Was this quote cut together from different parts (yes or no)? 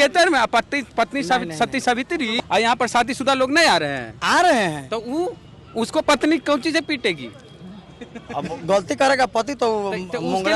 yes